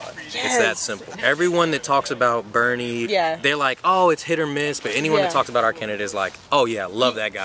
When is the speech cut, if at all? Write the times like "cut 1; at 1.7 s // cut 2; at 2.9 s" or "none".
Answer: cut 1; at 1.2 s // cut 2; at 3.0 s